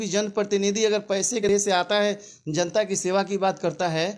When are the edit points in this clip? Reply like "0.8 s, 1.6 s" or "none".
1.4 s